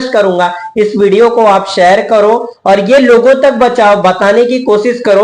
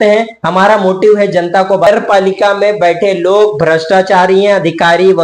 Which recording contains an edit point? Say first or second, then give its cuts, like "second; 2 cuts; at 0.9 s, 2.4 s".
second; 1 cut; at 1.9 s